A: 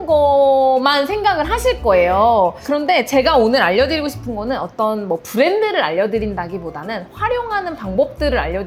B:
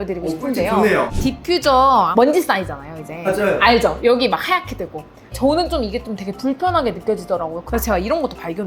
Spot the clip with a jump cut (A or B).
B